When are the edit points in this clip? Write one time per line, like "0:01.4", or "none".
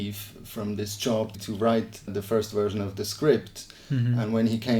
none